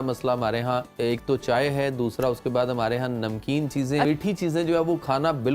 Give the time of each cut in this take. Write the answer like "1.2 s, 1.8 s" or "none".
0.9 s, 4.1 s